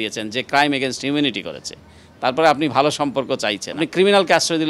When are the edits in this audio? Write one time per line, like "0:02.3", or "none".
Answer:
0:03.8